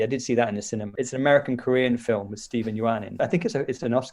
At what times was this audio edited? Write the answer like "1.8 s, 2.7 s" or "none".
1.0 s, 3.1 s

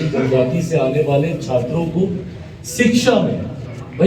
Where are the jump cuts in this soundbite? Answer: none

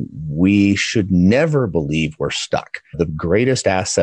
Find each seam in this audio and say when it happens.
3.0 s

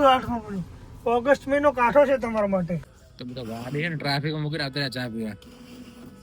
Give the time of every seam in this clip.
2.9 s

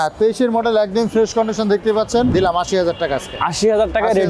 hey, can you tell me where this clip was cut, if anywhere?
2.3 s

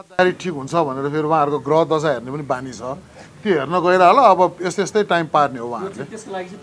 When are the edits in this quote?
none

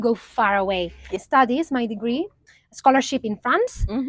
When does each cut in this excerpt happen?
1.1 s, 2.4 s

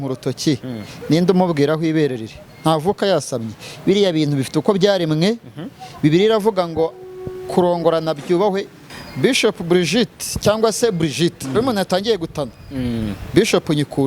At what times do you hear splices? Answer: 8.8 s

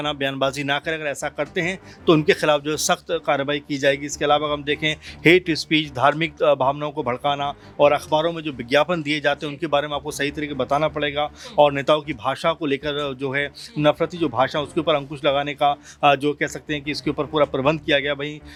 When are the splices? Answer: none

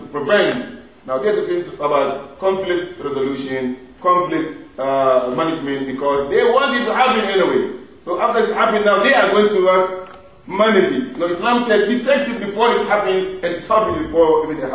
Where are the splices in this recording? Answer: 11.2 s

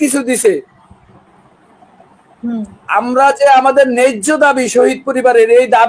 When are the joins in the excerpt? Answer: none

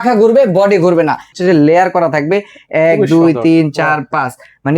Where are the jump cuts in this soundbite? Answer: 1.3 s

